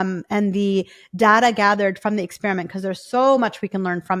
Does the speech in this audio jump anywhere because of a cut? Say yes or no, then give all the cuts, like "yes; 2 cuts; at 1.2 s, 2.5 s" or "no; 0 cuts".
no; 0 cuts